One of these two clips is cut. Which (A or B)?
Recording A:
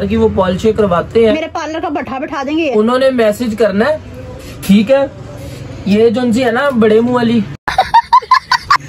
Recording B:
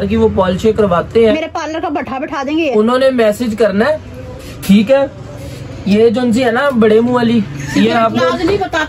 B